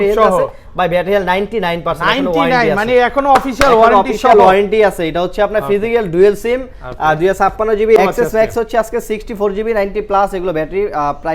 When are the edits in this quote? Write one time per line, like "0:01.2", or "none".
0:08.0

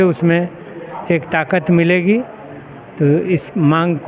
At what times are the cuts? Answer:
none

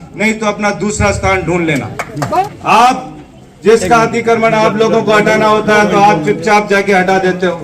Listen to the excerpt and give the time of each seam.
0:02.4

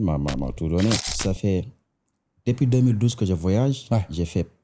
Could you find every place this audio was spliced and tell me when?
0:01.1

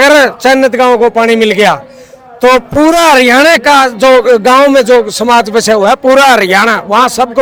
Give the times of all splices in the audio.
none

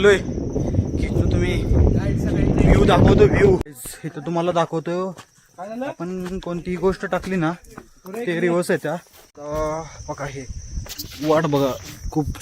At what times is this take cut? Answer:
0:03.6
0:09.4

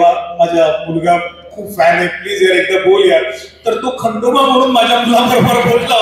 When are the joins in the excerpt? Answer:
none

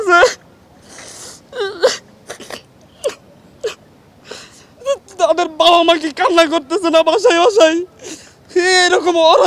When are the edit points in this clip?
none

